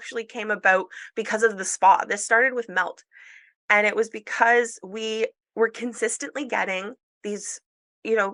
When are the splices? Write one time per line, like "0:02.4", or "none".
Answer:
none